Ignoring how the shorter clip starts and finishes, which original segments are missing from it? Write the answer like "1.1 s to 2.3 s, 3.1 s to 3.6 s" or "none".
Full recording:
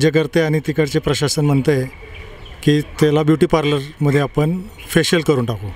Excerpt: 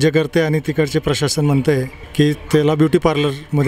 2.0 s to 2.5 s